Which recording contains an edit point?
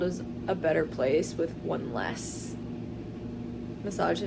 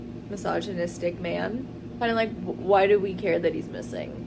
second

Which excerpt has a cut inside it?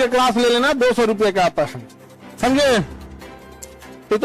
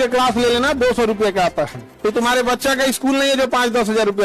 second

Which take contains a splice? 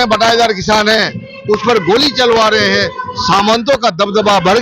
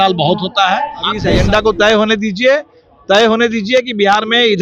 second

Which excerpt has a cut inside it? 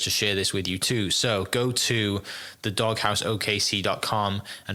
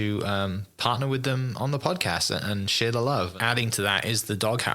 second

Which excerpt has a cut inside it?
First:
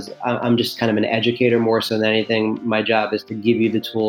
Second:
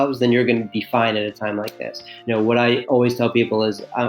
second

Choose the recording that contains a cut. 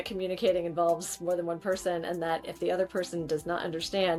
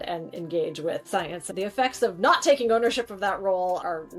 second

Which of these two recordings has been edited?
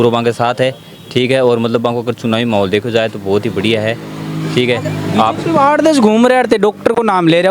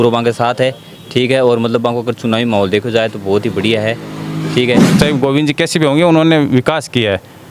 second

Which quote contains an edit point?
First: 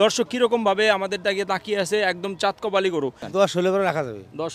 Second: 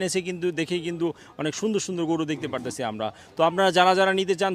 first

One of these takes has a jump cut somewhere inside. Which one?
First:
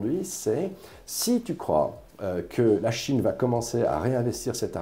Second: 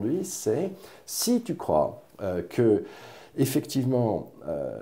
first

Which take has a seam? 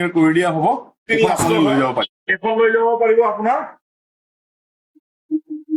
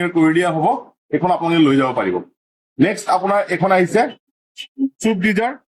first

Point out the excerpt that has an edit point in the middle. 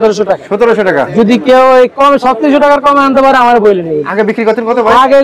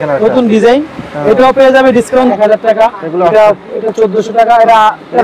second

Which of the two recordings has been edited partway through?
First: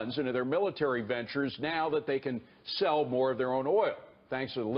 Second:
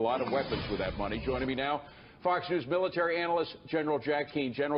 first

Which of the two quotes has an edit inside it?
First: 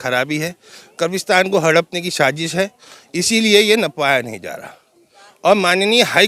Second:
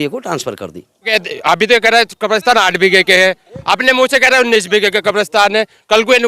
second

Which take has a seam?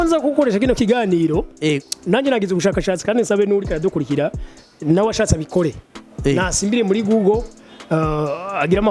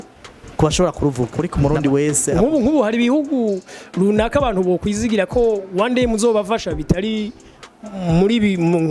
second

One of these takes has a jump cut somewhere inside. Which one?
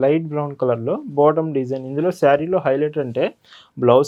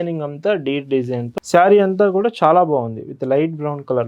second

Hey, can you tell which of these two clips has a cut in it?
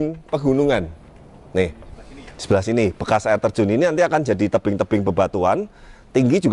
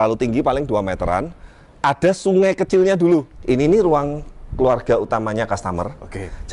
second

